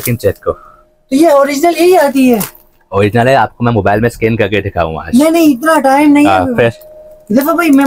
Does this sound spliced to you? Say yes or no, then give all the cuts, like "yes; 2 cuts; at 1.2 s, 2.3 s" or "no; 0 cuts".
no; 0 cuts